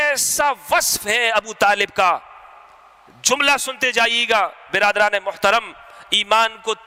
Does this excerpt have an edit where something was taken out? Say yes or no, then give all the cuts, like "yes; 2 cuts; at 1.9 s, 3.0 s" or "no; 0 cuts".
no; 0 cuts